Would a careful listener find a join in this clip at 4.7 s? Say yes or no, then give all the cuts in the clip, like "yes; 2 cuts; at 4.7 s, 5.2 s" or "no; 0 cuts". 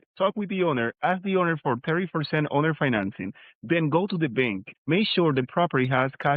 yes; 1 cut; at 4.7 s